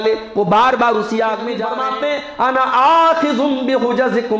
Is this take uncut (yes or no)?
no